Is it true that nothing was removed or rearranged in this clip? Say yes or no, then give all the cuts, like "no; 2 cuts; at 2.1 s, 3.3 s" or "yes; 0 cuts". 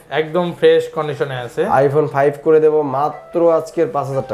yes; 0 cuts